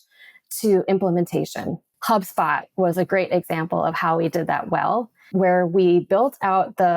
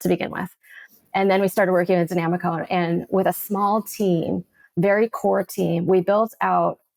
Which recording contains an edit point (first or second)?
first